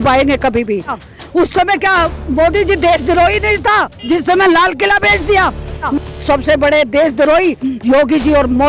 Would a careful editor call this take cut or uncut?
cut